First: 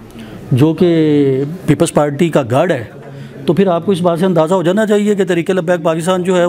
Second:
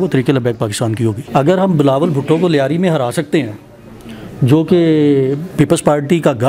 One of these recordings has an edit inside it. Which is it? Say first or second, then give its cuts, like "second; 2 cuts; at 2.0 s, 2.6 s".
second; 1 cut; at 1.2 s